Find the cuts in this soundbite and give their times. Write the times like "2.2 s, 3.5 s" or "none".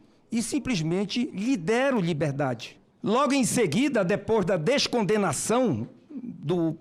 2.7 s

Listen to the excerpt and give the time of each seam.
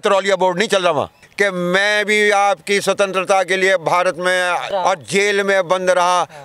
1.2 s, 4.7 s

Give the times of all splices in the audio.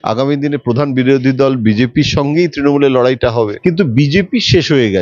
3.5 s

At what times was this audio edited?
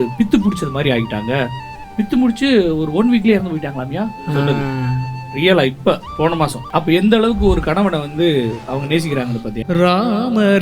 6.6 s, 9.6 s

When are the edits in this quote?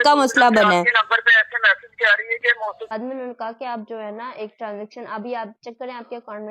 2.9 s

